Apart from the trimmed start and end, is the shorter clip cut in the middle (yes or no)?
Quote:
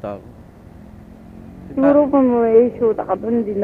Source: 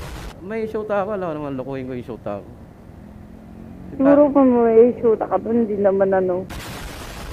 no